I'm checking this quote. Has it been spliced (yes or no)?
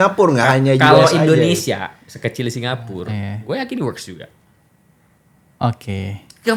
no